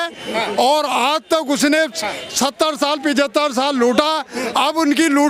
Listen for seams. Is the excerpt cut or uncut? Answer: uncut